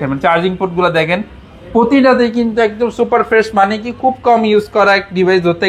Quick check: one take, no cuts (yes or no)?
yes